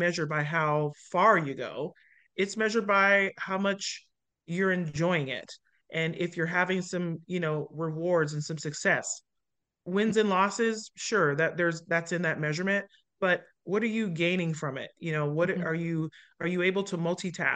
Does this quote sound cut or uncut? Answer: uncut